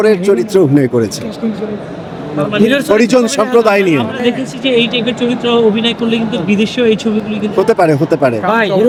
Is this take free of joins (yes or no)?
yes